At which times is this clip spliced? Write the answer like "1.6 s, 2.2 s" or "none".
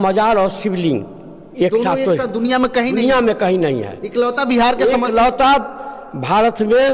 none